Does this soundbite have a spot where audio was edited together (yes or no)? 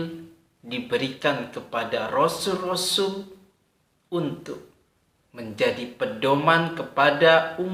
no